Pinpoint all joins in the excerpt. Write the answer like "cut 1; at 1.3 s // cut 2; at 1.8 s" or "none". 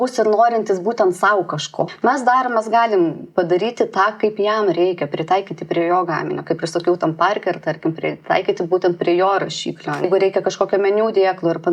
cut 1; at 1.8 s // cut 2; at 10.0 s